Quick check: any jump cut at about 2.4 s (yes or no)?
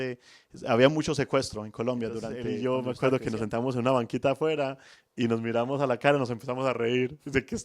yes